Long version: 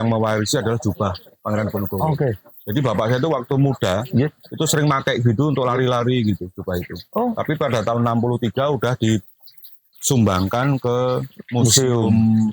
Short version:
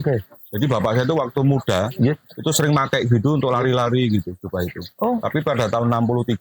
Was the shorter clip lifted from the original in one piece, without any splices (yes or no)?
yes